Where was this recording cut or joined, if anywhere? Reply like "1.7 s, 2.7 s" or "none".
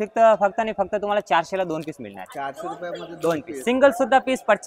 none